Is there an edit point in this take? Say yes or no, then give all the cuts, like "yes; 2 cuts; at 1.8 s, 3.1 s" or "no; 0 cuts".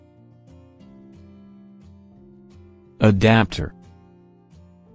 yes; 1 cut; at 1.1 s